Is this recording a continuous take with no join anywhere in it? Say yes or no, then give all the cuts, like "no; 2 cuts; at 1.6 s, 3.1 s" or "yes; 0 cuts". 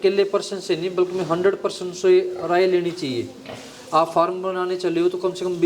yes; 0 cuts